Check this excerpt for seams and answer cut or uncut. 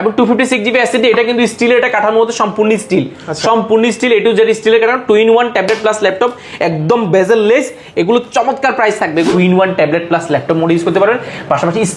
cut